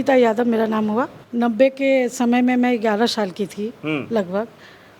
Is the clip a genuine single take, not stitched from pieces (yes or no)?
no